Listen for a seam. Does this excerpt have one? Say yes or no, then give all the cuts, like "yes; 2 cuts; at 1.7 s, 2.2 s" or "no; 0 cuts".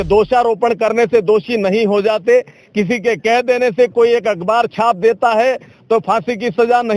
no; 0 cuts